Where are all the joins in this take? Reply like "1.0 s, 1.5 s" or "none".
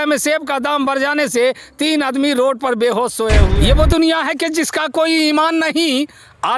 3.5 s